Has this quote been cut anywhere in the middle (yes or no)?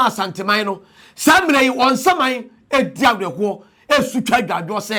no